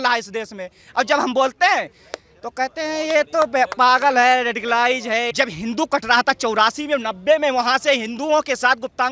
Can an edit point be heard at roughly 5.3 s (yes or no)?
yes